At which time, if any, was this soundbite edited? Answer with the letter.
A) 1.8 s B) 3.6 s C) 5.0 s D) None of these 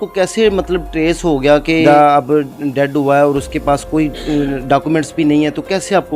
A